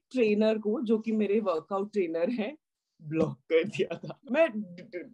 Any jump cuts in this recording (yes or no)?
yes